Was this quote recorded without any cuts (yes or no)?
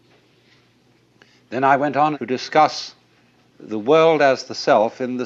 yes